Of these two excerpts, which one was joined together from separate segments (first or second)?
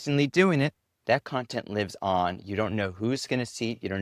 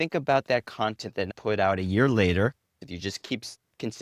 second